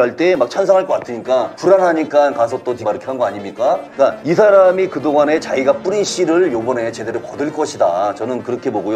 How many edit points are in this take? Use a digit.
3